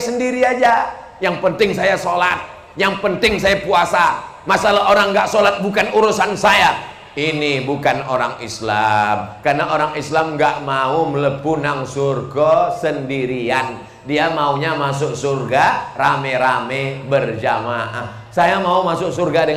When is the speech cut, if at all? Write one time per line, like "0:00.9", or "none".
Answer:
none